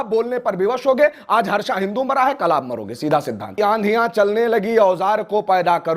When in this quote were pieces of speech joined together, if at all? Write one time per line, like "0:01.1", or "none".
0:03.5

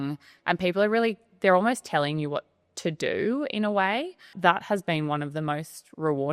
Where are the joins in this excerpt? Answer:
0:04.3

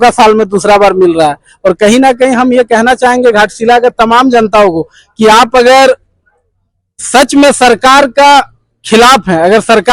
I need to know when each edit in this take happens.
none

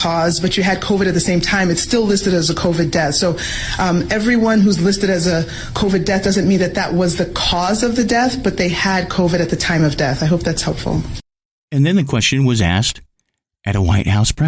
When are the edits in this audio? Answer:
none

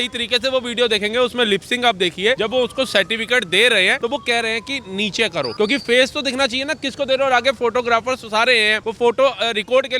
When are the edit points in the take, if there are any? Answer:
0:02.4
0:04.0
0:05.5
0:08.8

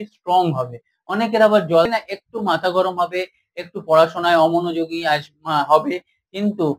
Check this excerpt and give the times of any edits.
0:01.9

